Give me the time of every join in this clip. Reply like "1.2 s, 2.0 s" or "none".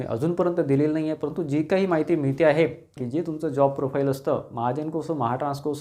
2.9 s